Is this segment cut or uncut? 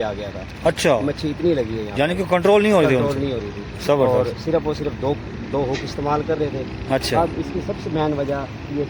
uncut